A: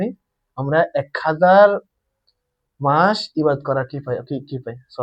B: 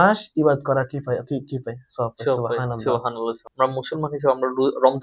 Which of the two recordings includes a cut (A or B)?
B